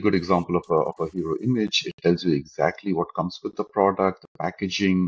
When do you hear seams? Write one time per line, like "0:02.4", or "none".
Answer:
none